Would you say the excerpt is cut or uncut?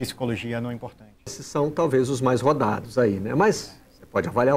cut